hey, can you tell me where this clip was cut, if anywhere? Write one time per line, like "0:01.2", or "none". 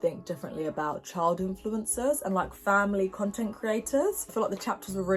0:04.3